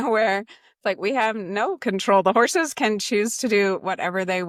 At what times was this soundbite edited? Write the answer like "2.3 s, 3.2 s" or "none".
none